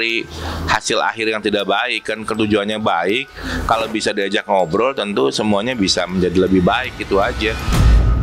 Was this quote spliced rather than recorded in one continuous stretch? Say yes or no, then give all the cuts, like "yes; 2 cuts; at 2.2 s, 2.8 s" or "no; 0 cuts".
no; 0 cuts